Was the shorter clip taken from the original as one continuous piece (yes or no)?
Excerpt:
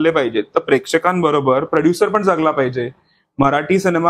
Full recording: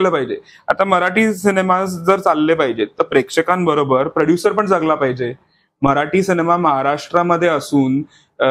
yes